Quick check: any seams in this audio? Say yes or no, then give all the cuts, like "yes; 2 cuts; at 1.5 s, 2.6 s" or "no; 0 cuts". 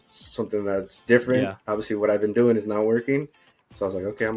no; 0 cuts